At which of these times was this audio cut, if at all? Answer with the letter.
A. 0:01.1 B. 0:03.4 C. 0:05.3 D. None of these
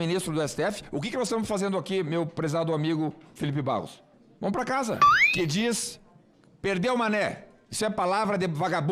C